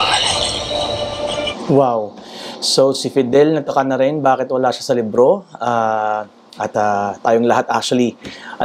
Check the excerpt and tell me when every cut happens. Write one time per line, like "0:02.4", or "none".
0:01.5